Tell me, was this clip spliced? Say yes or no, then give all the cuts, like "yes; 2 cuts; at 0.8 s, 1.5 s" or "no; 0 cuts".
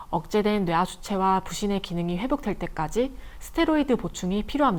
no; 0 cuts